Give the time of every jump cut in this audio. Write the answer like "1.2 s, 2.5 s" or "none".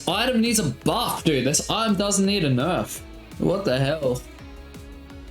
none